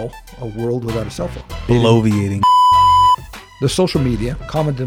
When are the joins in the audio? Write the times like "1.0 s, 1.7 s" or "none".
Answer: 1.5 s, 2.3 s, 3.4 s